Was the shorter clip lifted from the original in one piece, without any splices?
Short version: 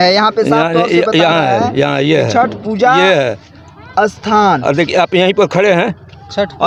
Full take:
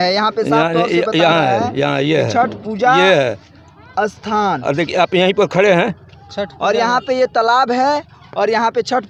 yes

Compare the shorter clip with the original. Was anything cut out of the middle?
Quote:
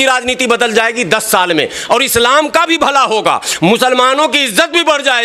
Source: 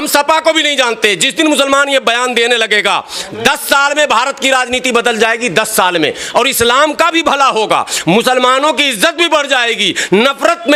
no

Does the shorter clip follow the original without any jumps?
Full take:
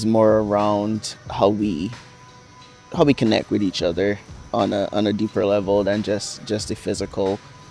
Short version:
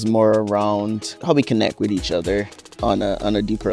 no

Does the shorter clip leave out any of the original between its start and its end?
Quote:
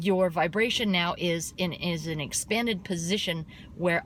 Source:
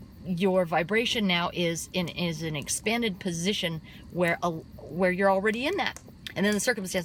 no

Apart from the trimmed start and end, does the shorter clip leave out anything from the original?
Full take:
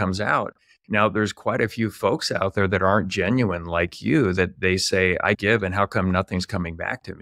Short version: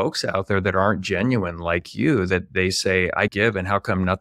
no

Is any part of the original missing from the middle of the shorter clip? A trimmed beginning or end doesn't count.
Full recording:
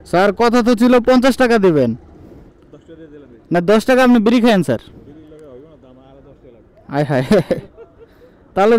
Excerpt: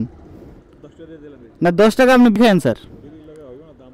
yes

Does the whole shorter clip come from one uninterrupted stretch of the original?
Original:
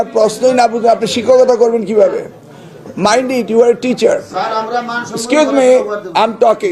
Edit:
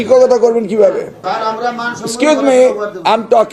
no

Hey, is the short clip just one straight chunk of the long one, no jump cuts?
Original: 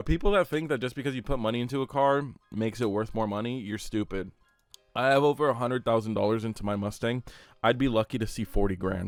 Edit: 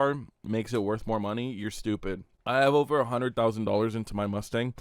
no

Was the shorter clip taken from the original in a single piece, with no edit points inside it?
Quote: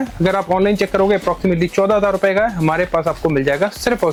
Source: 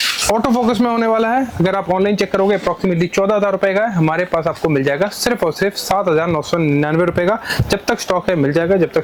yes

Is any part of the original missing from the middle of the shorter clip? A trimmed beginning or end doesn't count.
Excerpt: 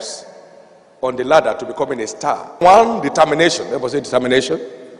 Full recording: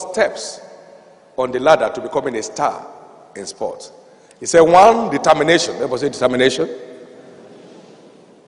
yes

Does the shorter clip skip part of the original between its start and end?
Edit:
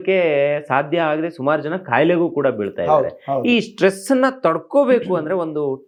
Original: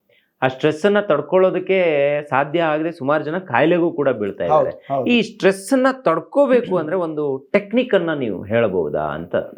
no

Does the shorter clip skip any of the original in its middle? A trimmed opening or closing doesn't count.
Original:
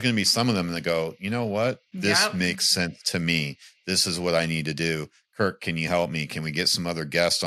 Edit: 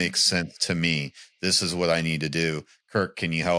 no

